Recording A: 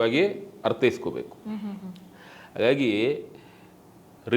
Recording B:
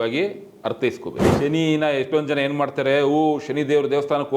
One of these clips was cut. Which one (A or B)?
B